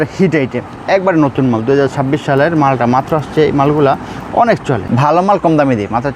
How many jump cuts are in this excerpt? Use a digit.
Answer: 1